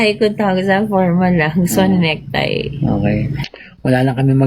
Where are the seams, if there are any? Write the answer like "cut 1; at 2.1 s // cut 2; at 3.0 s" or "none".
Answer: cut 1; at 3.4 s